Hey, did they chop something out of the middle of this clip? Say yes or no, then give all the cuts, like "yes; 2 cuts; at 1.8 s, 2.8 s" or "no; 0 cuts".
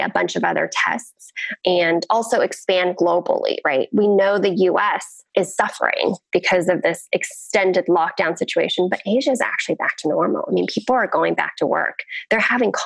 yes; 2 cuts; at 1.6 s, 5.1 s